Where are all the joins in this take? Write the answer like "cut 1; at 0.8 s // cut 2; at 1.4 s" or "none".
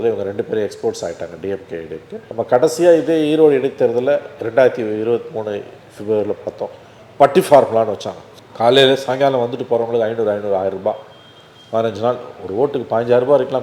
none